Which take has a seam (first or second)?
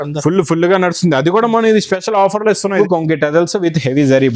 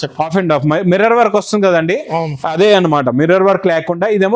first